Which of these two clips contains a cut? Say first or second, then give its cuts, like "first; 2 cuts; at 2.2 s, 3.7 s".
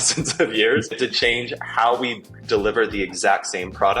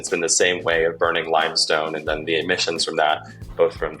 first; 1 cut; at 1.0 s